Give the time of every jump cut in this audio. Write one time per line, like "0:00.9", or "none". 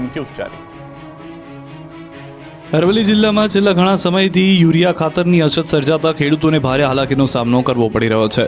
none